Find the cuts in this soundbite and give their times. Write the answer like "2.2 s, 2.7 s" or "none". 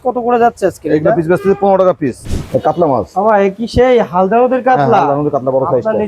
2.2 s